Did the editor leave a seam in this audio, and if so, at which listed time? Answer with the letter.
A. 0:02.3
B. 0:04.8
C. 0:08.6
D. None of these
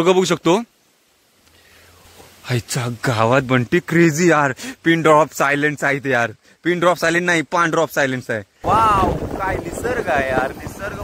C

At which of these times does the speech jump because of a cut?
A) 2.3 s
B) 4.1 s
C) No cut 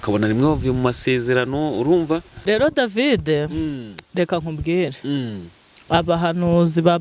A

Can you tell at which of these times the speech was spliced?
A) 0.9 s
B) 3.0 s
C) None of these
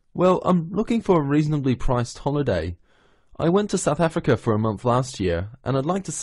C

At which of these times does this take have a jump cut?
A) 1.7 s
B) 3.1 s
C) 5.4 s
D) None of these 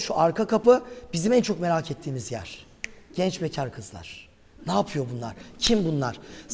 D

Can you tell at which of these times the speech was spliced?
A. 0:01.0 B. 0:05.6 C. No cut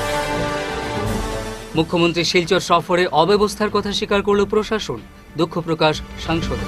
A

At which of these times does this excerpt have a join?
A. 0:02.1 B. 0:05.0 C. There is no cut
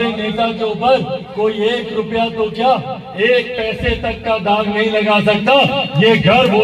C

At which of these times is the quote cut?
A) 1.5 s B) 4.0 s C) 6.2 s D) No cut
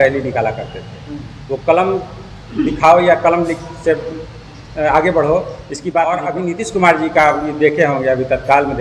C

